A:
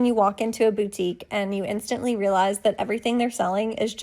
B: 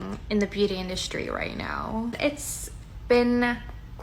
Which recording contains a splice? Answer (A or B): B